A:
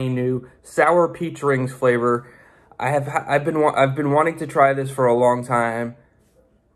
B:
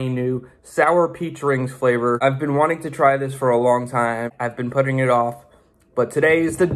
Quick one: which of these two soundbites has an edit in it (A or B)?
B